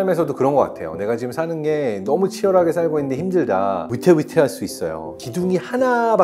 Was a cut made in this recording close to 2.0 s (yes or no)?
no